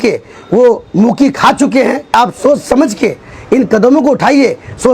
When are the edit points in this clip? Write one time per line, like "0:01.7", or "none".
0:02.1